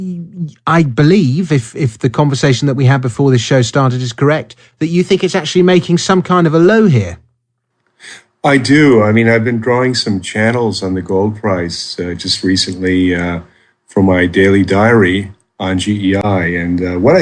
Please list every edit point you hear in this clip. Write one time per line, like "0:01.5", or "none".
0:12.7